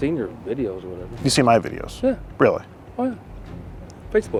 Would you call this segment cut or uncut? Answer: uncut